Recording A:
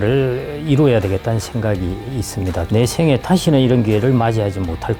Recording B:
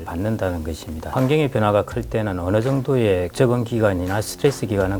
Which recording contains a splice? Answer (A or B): B